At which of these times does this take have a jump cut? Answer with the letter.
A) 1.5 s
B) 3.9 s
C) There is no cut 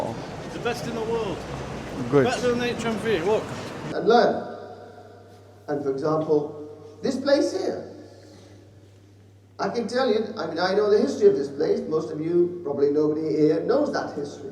B